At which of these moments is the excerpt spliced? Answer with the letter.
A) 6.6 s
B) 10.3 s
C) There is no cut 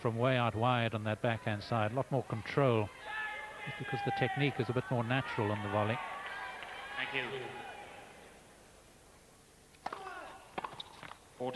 C